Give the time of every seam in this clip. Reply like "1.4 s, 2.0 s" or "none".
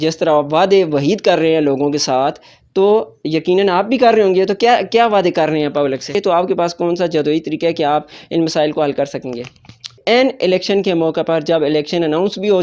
6.1 s, 10.0 s